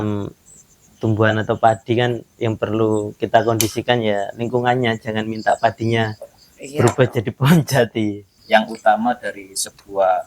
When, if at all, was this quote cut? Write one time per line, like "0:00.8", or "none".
0:08.3